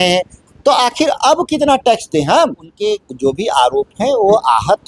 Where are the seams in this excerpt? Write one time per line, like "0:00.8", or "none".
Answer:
0:02.7